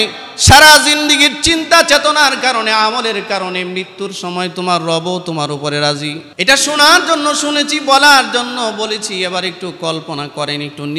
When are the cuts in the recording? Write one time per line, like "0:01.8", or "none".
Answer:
0:06.2